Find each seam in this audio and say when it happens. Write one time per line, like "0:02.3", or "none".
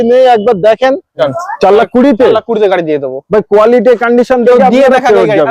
0:01.3